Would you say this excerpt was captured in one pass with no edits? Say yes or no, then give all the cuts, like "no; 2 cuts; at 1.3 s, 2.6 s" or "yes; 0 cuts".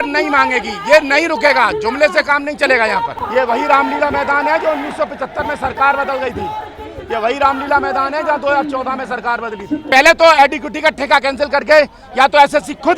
no; 2 cuts; at 3.2 s, 9.8 s